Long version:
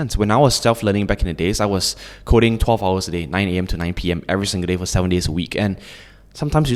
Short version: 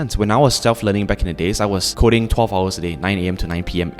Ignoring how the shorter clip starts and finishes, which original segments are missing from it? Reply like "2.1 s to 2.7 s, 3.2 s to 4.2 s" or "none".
1.9 s to 2.2 s